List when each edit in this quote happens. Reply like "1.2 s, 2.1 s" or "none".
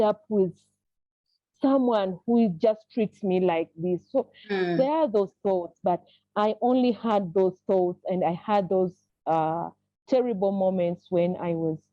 none